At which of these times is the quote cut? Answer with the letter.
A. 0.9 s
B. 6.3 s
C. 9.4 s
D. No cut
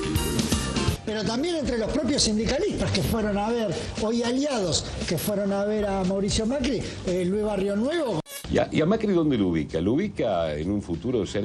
D